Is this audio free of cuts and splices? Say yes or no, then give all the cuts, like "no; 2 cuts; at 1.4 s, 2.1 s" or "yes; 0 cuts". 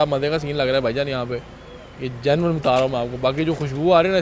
yes; 0 cuts